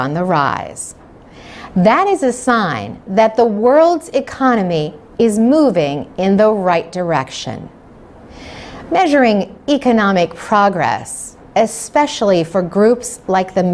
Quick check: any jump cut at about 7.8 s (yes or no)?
no